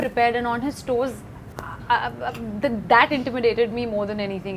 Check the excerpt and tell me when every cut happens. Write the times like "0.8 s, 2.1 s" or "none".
none